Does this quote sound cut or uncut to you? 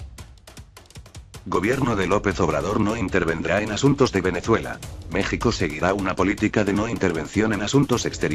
uncut